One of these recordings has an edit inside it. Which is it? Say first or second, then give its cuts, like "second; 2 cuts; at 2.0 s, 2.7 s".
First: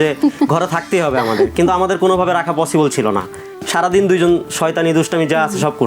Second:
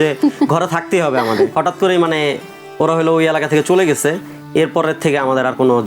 second; 1 cut; at 1.5 s